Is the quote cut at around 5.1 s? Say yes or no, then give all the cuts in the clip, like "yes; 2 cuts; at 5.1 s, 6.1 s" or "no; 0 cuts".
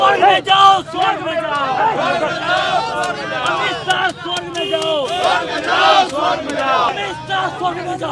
no; 1 cut; at 6.9 s